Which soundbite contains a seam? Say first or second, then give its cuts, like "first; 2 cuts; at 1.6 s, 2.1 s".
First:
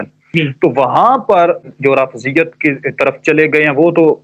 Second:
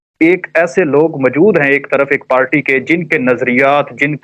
first; 1 cut; at 1.7 s